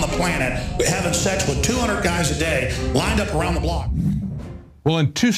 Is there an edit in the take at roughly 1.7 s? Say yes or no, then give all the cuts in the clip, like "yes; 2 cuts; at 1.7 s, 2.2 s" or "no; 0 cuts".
yes; 1 cut; at 1.7 s